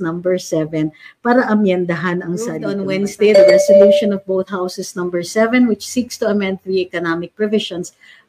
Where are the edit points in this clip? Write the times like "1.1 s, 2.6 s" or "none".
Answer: 2.7 s

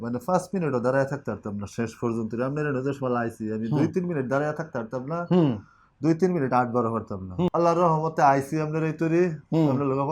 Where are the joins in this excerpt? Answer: 7.5 s

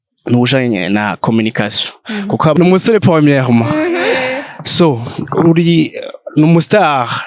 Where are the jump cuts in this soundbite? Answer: 2.5 s

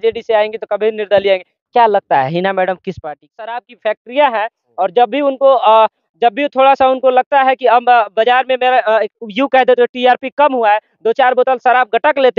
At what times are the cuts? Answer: 3.5 s

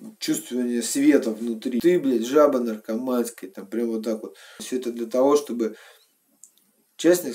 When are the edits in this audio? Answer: 1.8 s, 4.6 s

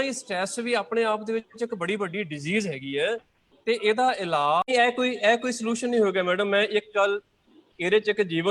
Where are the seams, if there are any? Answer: 4.6 s

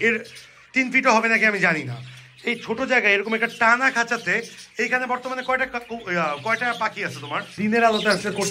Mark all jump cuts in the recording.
7.5 s

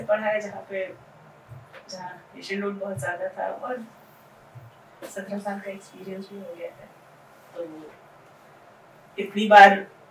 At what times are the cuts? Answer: none

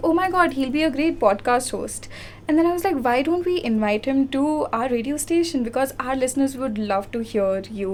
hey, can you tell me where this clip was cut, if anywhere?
none

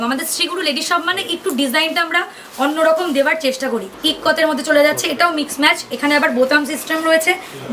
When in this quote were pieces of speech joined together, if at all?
3.9 s

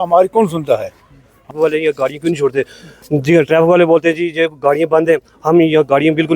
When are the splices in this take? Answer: 1.5 s

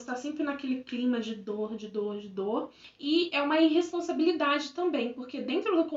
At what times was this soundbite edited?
2.9 s

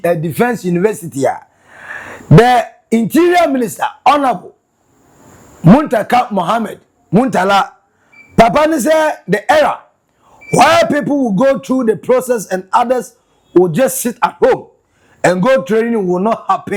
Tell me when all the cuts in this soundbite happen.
none

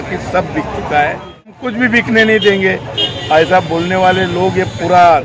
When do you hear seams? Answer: 1.6 s

